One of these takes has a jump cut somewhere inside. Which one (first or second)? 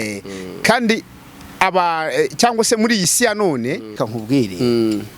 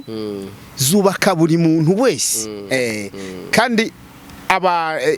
first